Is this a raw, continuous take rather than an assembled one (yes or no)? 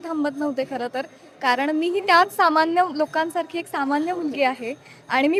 yes